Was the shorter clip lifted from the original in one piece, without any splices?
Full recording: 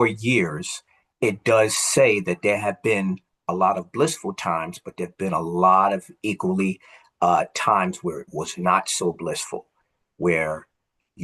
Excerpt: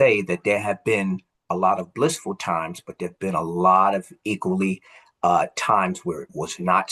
yes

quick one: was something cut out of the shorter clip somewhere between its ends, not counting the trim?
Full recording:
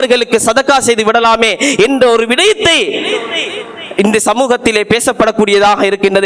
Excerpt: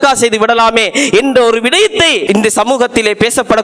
yes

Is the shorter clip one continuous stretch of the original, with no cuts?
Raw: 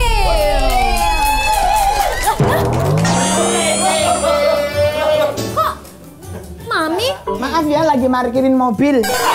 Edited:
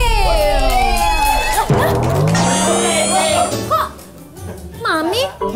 no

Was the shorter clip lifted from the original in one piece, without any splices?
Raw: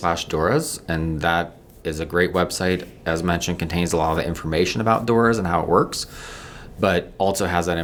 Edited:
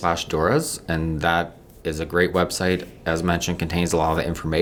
yes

